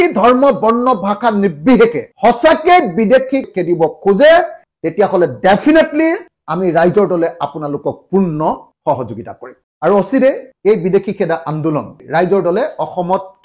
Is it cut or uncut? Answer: cut